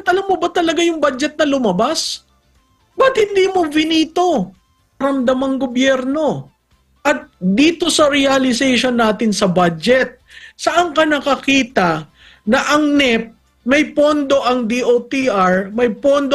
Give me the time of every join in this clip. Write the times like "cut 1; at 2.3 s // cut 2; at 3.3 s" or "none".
cut 1; at 5.0 s